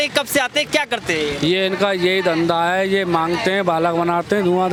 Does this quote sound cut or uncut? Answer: uncut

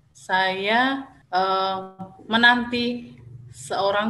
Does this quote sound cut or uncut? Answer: cut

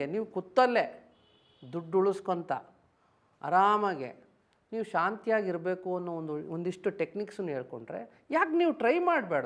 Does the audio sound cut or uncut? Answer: uncut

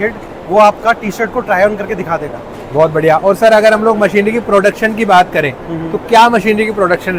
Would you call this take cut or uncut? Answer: uncut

